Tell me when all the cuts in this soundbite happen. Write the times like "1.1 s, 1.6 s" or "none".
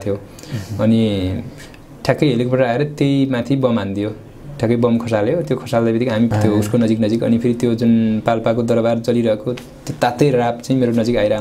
6.3 s